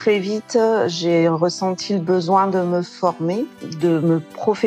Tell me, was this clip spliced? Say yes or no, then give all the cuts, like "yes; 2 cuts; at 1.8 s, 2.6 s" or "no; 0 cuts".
no; 0 cuts